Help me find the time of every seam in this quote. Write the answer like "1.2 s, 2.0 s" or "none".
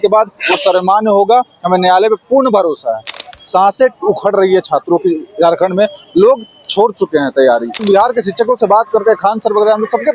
3.1 s, 7.8 s